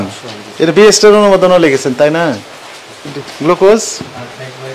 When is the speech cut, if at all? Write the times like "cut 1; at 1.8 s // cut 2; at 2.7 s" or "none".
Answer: cut 1; at 3.2 s